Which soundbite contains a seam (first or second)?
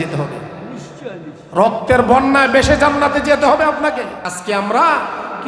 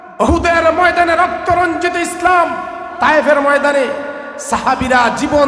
first